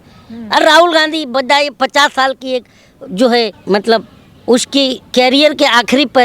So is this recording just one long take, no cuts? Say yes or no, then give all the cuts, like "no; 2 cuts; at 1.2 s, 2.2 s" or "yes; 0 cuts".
no; 2 cuts; at 3.6 s, 5.0 s